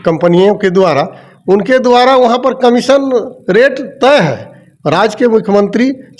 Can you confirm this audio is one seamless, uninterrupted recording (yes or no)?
yes